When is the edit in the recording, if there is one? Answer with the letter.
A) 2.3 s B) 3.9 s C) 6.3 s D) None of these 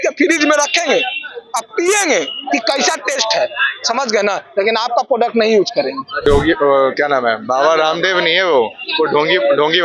C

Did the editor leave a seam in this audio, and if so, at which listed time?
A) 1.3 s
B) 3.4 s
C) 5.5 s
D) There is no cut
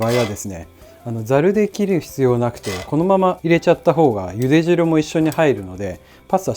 B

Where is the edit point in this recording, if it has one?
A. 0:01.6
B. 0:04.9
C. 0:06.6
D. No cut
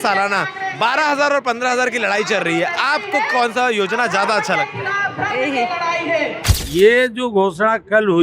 C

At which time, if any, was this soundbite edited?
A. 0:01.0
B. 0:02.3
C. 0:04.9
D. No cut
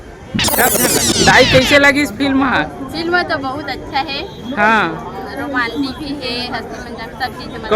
A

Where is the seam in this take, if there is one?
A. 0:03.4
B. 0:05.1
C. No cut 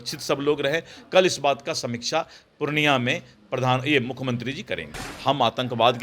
B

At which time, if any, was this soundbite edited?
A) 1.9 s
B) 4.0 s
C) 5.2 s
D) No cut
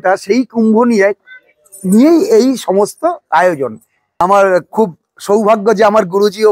B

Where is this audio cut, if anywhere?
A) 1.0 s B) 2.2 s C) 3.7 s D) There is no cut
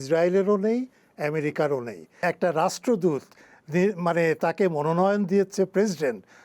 B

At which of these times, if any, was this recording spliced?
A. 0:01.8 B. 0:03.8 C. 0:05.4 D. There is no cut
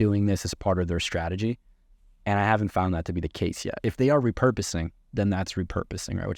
B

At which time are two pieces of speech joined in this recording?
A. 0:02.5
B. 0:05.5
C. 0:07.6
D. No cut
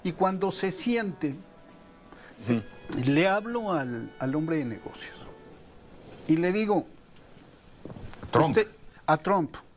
A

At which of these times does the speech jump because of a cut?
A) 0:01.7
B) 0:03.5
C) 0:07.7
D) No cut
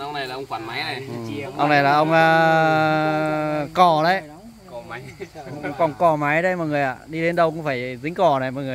D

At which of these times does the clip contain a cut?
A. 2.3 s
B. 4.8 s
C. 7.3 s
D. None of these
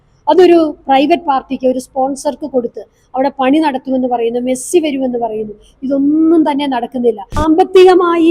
C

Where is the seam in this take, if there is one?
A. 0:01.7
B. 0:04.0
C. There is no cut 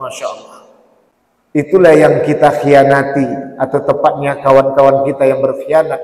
A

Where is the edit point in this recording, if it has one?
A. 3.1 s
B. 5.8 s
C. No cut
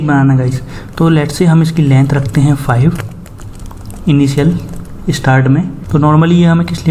B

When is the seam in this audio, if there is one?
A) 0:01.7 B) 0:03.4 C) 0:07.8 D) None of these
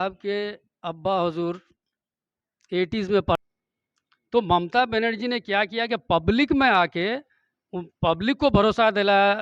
B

